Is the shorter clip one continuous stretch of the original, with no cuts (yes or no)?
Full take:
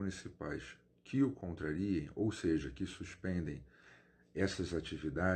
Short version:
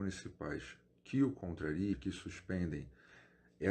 no